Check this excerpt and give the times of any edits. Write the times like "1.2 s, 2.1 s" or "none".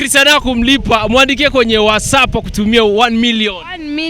none

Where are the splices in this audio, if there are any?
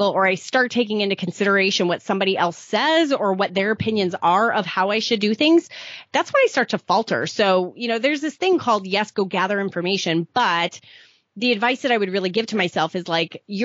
none

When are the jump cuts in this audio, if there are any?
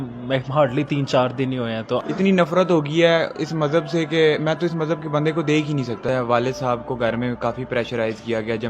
1.9 s, 6.0 s

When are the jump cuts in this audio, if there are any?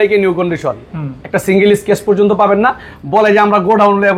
2.9 s

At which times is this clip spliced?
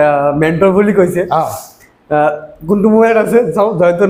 none

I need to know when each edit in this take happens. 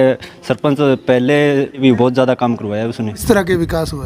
1.8 s, 3.2 s

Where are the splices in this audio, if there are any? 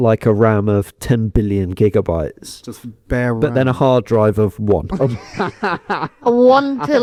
none

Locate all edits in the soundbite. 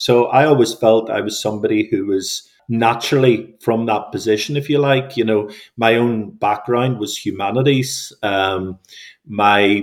2.5 s

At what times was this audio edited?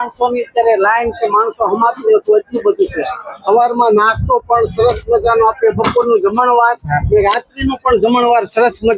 none

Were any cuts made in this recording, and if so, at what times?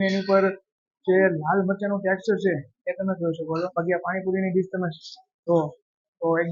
3.7 s

